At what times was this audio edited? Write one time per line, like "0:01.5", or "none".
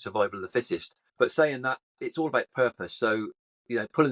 0:01.0